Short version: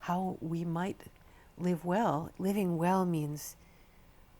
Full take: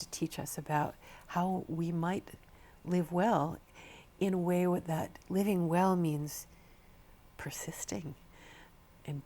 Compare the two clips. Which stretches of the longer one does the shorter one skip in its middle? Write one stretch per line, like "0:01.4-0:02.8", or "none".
0:03.6-0:05.2